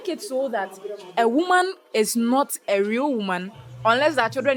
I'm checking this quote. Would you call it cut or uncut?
uncut